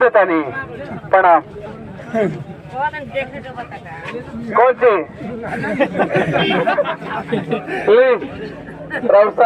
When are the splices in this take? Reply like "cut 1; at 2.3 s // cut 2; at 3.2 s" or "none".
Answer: none